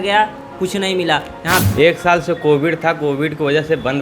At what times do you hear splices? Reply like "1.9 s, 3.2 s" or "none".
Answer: 1.6 s